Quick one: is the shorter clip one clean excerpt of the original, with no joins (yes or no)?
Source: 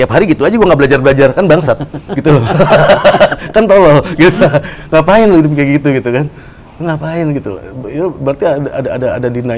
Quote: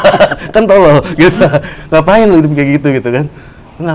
yes